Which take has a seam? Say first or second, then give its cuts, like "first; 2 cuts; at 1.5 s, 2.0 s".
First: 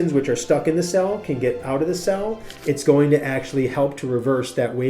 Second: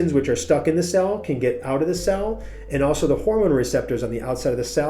first; 1 cut; at 2.5 s